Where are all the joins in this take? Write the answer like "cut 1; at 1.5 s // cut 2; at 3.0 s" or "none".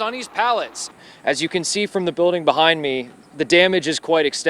cut 1; at 1.1 s